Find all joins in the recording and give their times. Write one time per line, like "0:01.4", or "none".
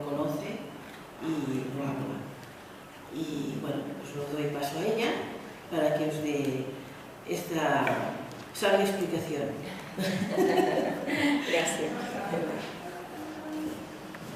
0:12.9